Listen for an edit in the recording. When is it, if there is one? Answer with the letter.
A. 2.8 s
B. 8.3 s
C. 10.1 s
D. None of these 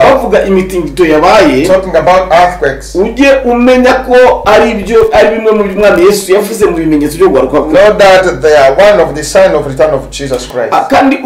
D